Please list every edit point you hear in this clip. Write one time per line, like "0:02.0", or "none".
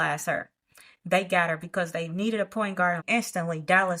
0:03.0